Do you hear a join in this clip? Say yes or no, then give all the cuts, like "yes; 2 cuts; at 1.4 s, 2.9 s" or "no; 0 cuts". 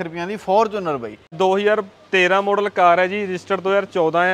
yes; 1 cut; at 1.2 s